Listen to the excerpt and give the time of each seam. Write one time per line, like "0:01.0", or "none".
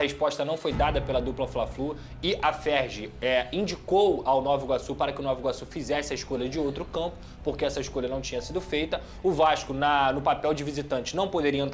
none